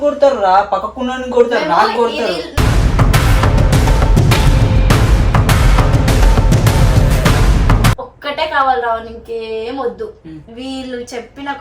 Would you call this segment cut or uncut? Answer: cut